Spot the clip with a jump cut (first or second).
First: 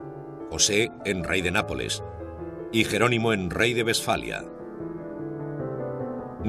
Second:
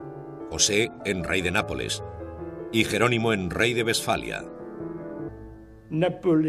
first